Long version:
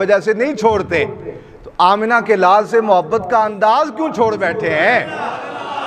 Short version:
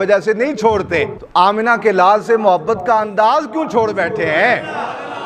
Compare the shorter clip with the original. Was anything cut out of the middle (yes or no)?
yes